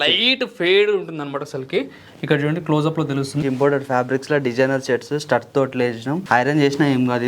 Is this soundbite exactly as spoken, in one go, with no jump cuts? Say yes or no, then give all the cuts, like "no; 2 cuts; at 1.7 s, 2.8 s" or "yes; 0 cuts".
no; 2 cuts; at 3.4 s, 6.2 s